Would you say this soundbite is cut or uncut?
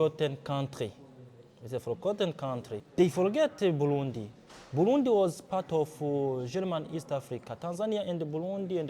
cut